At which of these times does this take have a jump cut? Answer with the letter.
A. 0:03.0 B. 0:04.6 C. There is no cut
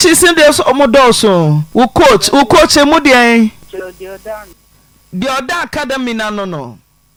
C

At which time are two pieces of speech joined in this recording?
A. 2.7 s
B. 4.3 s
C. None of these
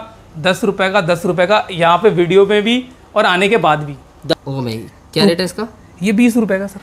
B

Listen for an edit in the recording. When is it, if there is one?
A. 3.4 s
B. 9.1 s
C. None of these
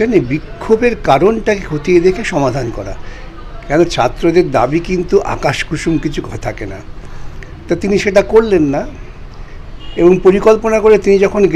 C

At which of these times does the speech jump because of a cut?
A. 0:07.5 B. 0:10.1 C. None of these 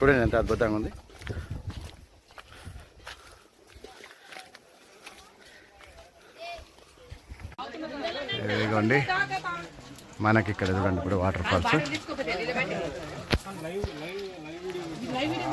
A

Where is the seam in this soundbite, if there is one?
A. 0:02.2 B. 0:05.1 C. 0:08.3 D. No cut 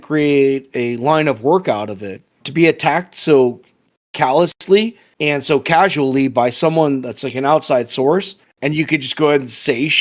D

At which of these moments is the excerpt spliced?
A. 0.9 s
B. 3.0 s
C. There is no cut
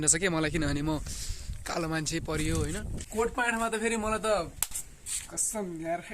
B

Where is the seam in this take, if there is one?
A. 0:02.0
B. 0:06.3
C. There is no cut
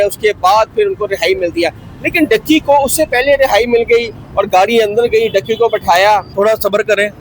B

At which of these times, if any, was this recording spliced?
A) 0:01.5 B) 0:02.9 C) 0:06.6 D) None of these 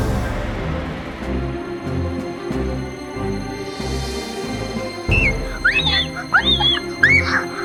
D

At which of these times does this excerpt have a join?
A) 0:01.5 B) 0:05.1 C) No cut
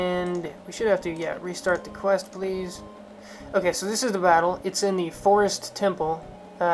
A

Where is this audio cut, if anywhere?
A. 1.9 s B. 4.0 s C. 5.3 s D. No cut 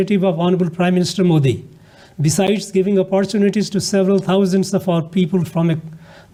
D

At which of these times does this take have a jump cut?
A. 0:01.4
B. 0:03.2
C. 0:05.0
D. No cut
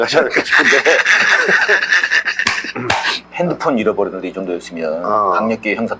B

